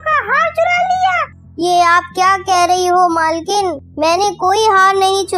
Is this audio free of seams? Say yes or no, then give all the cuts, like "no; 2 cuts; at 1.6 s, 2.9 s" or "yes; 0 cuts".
yes; 0 cuts